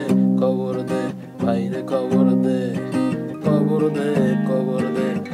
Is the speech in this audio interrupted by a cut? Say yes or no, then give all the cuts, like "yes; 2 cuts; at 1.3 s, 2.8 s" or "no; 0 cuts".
no; 0 cuts